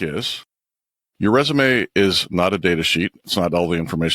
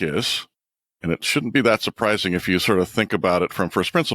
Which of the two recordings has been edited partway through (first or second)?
first